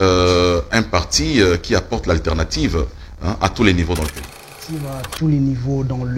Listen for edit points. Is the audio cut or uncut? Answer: cut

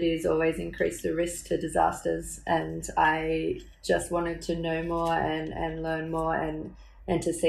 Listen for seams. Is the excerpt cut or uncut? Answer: uncut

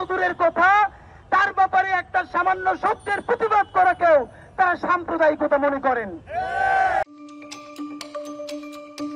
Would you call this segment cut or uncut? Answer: uncut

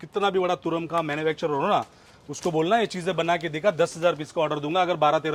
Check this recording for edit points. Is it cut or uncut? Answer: uncut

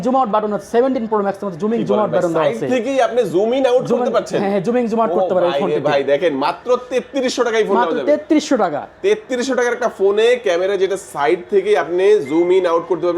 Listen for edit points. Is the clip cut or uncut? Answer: uncut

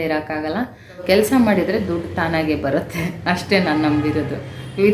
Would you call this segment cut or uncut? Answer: cut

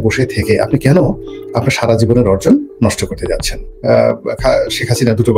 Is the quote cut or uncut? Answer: cut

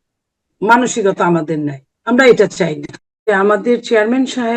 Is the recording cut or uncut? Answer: cut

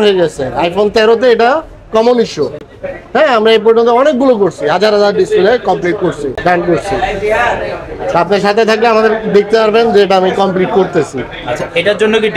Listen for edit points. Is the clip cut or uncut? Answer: uncut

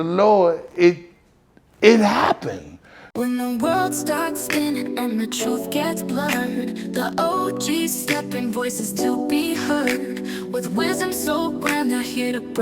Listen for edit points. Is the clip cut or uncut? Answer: cut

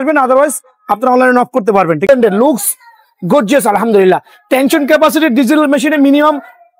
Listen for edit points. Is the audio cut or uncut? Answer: cut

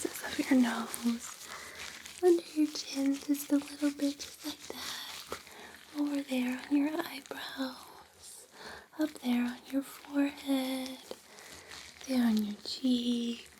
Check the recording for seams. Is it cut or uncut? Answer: uncut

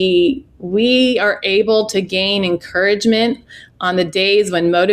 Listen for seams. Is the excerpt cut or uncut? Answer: uncut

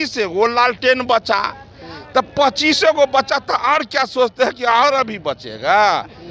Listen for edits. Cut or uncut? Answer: uncut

